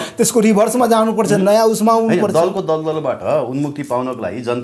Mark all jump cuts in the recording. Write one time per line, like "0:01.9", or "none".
none

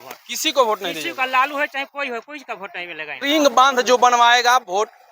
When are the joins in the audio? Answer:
0:03.2

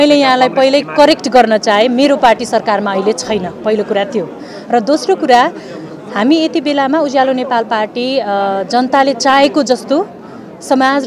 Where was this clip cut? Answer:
none

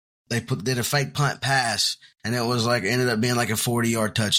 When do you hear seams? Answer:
none

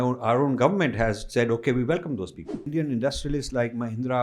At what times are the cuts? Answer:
0:02.7

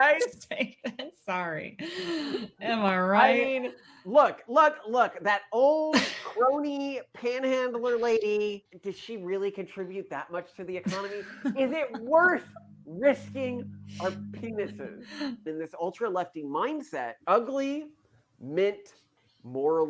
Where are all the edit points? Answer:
0:08.7
0:15.4
0:17.2

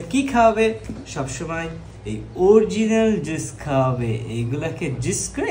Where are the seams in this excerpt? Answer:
none

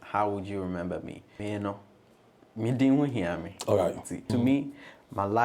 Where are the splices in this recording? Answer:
0:01.2
0:04.3

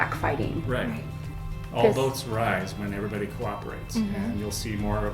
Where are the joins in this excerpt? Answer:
0:01.4

